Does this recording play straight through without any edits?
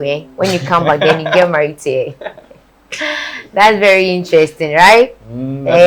yes; 0 cuts

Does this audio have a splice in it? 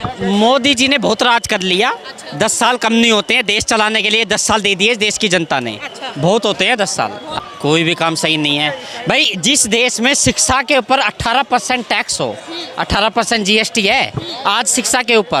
no; 0 cuts

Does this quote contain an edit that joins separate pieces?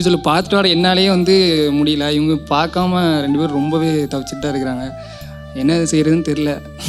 no; 0 cuts

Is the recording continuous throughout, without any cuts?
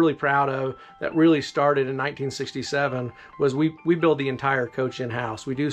yes; 0 cuts

